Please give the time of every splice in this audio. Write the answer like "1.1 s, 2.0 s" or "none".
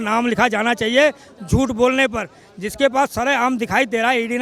none